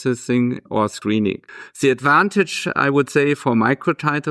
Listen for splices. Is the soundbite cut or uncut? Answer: cut